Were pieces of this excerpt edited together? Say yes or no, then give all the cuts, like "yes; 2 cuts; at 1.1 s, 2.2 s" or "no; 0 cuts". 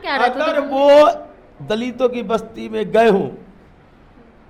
no; 0 cuts